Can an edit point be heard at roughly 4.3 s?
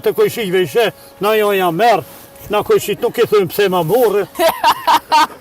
yes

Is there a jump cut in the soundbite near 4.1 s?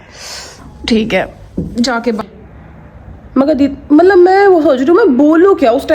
no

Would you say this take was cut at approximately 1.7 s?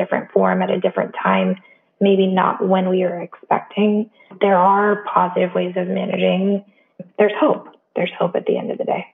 no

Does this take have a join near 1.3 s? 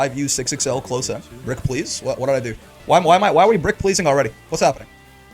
no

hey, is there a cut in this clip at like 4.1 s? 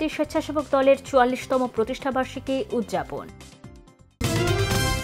yes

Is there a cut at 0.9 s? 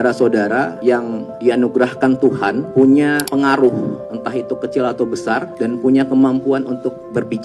yes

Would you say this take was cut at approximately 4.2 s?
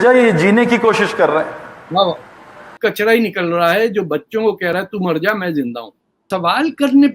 no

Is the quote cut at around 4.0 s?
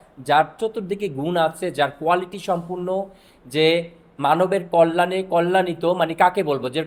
no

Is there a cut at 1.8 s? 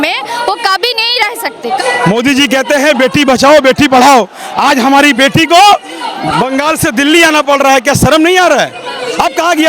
yes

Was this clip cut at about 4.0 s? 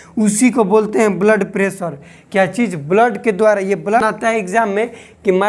yes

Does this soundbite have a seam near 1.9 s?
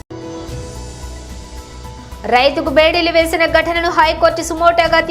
yes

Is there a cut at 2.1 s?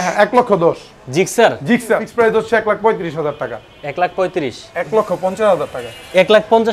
yes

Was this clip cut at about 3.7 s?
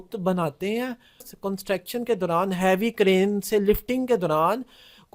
no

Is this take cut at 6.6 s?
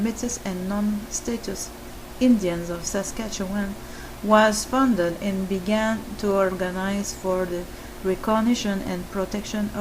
no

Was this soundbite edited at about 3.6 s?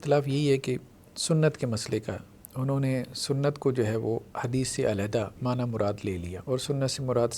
no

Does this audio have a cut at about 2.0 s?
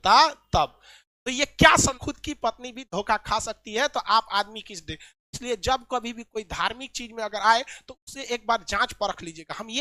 yes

